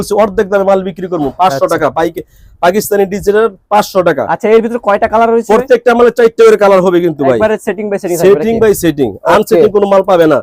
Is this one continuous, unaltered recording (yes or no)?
yes